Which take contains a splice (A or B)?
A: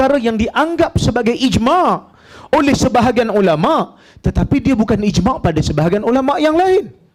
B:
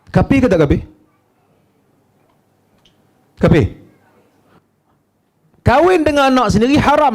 B